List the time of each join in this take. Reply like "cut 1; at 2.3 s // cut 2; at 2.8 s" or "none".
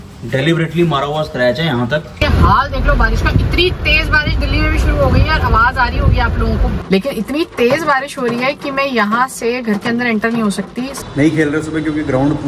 cut 1; at 2.2 s // cut 2; at 6.8 s // cut 3; at 11.1 s